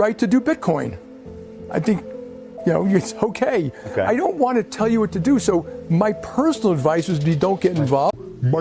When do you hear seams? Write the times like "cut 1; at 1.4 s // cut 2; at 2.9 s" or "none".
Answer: cut 1; at 5.6 s